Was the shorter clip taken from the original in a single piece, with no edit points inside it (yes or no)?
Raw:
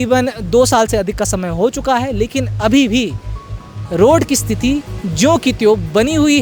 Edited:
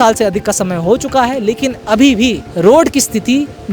no